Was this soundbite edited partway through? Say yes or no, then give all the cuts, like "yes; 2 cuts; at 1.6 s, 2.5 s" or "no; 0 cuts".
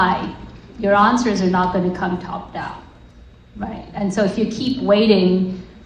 no; 0 cuts